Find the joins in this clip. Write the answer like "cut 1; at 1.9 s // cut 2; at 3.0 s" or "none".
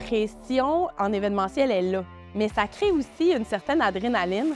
none